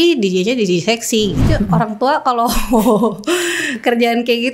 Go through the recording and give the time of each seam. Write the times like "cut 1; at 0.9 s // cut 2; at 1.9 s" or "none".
cut 1; at 1.5 s